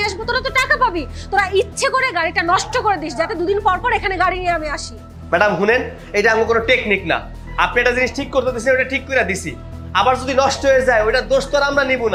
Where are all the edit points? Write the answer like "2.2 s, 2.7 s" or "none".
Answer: none